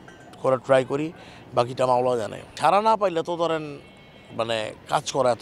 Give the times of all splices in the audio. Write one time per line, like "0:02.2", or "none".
0:02.4